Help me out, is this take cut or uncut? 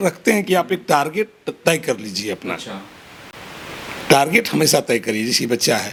uncut